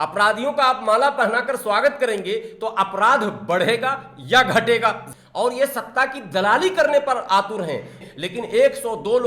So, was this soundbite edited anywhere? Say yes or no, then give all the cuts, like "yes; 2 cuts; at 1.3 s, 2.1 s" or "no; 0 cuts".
yes; 2 cuts; at 5.1 s, 8.0 s